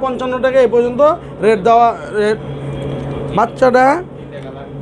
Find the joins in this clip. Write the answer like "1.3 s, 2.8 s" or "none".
2.4 s